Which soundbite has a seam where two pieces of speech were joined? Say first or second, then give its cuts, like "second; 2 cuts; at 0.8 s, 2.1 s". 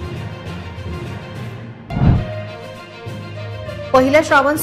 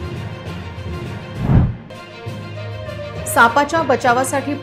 second; 1 cut; at 1.3 s